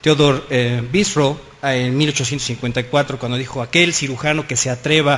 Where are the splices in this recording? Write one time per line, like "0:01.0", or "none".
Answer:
none